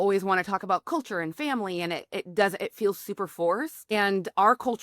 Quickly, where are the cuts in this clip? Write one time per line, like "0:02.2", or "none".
0:03.9